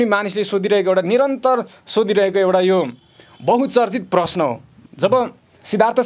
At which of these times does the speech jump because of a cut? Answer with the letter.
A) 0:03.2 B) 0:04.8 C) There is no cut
B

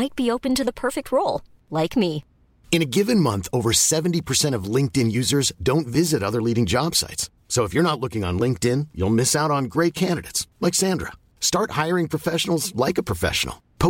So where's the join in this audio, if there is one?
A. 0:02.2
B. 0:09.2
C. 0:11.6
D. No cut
D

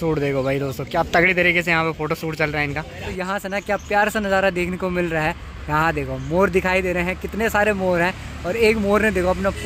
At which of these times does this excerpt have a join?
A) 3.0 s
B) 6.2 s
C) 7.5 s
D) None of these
A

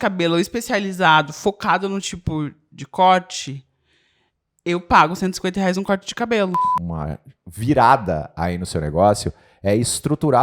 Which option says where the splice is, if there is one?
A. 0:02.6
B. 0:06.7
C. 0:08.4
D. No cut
B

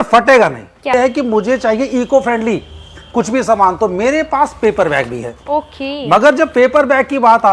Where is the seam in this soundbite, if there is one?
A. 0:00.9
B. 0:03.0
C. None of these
A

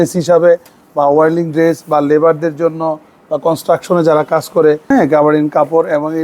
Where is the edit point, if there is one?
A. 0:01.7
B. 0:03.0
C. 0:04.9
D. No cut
C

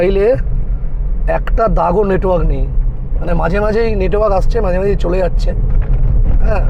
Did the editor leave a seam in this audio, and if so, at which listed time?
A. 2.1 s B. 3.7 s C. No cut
C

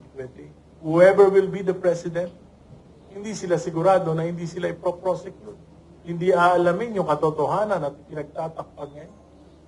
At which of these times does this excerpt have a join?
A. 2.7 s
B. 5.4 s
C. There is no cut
C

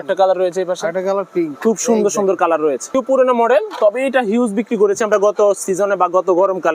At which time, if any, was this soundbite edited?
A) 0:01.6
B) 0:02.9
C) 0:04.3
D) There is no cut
B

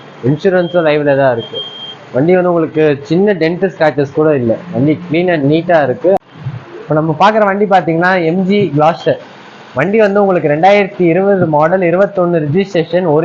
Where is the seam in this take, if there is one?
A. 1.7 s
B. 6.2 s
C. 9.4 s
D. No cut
B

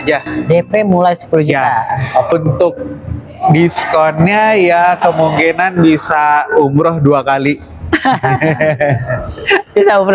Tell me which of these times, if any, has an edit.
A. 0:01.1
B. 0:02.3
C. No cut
B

